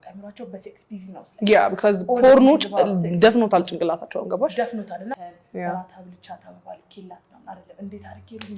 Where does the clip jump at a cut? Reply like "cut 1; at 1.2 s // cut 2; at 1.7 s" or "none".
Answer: cut 1; at 5.2 s